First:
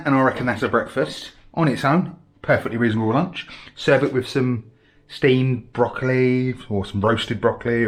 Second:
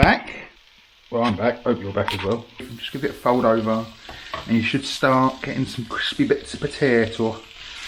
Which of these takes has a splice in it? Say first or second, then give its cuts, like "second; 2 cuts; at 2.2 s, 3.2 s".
second; 1 cut; at 2.8 s